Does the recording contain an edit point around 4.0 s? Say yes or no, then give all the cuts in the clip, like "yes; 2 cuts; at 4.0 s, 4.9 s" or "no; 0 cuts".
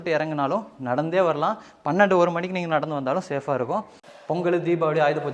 yes; 1 cut; at 4.0 s